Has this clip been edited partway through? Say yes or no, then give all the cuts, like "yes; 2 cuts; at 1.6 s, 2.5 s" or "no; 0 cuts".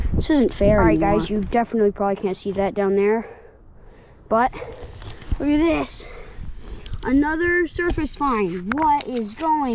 yes; 1 cut; at 1.0 s